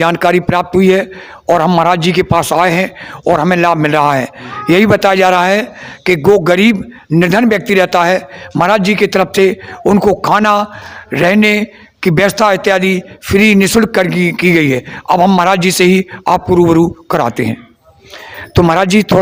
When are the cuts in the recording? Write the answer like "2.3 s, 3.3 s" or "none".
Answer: none